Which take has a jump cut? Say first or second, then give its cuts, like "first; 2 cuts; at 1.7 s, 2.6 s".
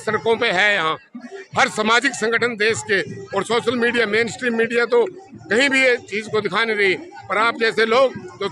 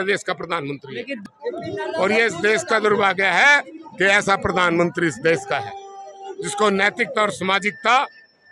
second; 1 cut; at 1.2 s